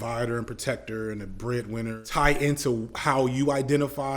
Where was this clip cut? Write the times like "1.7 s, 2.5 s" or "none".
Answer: 2.0 s